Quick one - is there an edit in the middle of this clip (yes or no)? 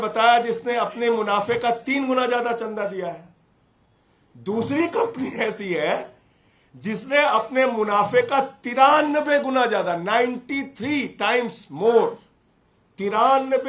no